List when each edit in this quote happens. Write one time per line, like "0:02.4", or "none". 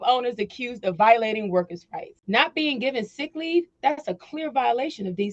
0:02.2